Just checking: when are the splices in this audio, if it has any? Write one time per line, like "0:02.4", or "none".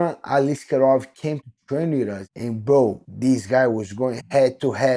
0:02.3
0:03.1